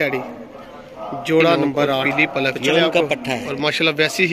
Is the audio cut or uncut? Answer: cut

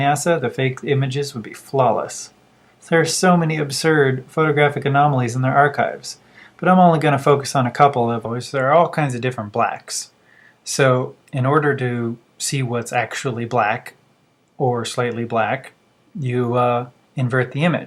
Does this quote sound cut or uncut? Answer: uncut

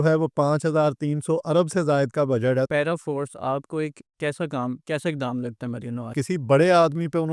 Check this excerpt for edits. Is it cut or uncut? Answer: cut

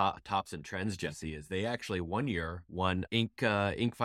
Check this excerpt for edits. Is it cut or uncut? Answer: cut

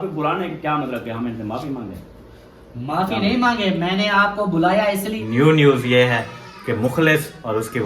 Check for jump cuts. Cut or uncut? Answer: cut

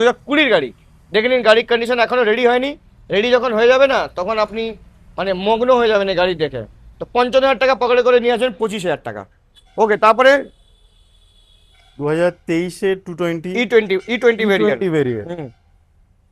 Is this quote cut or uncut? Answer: uncut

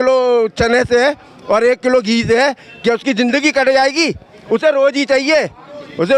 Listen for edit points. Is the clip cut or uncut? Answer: uncut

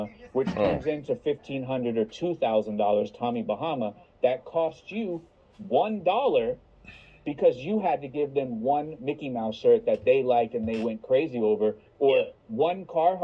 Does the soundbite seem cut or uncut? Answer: cut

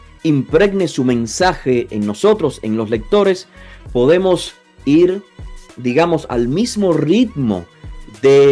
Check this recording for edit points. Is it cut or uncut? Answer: uncut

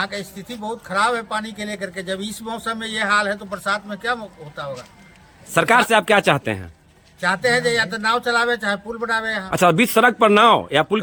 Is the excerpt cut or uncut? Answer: uncut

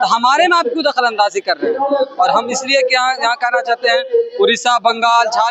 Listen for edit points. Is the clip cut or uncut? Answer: uncut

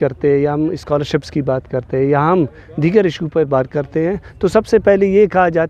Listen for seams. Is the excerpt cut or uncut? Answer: uncut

